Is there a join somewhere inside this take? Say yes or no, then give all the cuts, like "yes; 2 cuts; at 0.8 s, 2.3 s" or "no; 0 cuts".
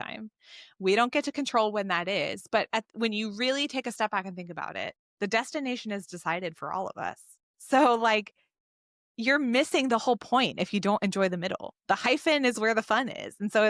no; 0 cuts